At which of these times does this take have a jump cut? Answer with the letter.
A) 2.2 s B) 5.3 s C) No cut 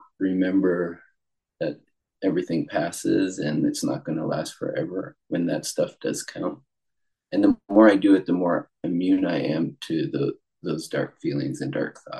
C